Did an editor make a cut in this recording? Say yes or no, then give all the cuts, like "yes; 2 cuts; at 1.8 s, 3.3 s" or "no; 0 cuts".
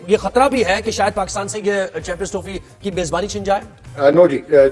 yes; 1 cut; at 3.8 s